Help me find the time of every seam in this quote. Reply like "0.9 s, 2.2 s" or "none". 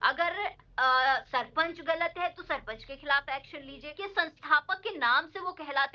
3.9 s